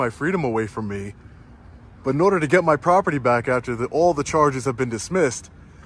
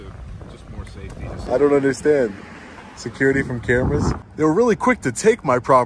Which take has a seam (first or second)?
second